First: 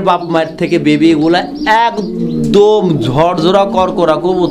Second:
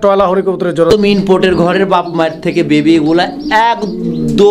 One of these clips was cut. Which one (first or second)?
second